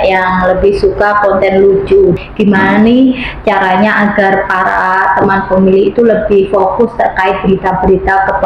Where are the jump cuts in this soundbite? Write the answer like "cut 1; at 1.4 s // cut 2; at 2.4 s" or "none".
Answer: cut 1; at 2.2 s